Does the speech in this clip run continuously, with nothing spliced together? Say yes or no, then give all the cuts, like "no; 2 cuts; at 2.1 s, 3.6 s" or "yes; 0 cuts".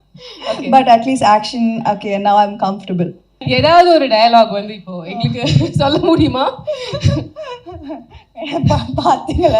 no; 1 cut; at 3.4 s